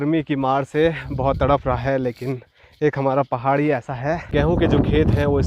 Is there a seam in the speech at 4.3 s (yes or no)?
yes